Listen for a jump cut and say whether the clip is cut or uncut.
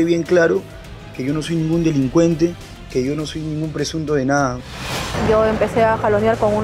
cut